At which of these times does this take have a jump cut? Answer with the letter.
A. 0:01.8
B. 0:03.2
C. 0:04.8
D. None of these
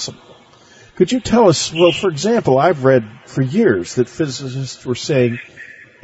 B